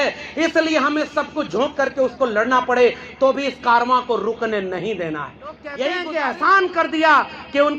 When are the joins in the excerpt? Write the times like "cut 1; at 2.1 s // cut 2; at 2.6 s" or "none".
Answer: cut 1; at 5.9 s